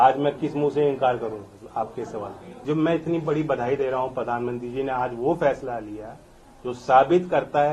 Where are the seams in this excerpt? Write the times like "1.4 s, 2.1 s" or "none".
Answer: 2.6 s